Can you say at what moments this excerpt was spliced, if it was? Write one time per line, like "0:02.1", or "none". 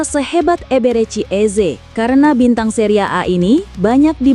none